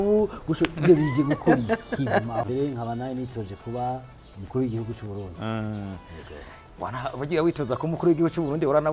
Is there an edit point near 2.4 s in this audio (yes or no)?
yes